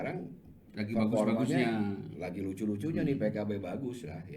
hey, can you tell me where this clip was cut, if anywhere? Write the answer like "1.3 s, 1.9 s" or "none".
none